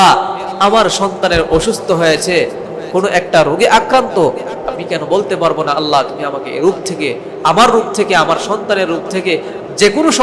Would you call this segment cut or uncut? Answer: uncut